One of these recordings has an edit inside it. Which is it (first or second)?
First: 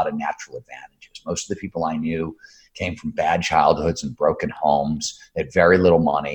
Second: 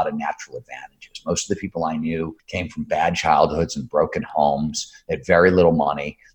second